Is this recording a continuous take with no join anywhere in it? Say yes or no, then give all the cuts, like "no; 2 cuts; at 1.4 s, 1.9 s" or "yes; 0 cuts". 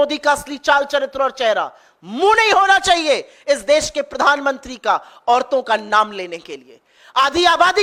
yes; 0 cuts